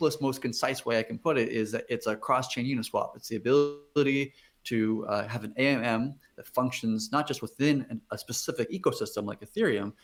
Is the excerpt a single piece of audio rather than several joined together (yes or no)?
yes